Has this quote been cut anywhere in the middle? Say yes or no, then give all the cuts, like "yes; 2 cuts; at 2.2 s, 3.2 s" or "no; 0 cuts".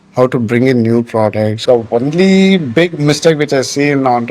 yes; 1 cut; at 1.6 s